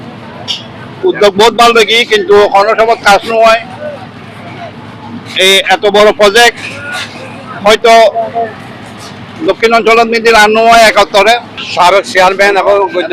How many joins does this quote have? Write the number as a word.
one